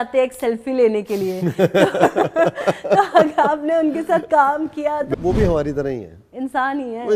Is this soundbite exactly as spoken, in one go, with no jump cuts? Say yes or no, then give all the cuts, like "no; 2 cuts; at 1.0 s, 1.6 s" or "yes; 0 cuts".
no; 1 cut; at 5.1 s